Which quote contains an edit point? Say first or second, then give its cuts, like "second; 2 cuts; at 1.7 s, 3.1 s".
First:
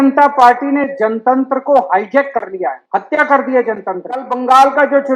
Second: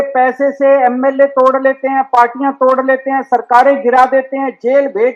first; 3 cuts; at 0.9 s, 2.8 s, 4.3 s